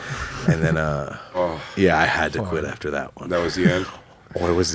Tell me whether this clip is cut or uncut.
uncut